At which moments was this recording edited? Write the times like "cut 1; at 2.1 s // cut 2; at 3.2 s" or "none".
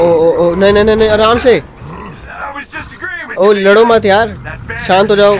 none